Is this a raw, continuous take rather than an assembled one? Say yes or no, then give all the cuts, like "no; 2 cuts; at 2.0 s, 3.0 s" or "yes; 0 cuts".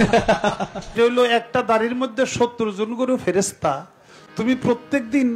no; 1 cut; at 0.9 s